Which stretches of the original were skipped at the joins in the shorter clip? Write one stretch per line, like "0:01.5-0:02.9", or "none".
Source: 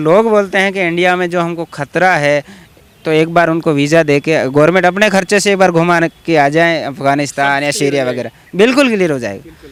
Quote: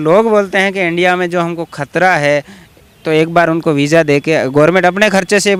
none